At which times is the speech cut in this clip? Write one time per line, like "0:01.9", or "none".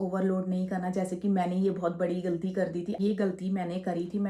0:03.0